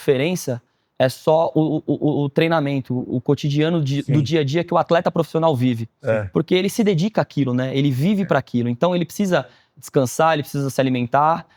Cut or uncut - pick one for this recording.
uncut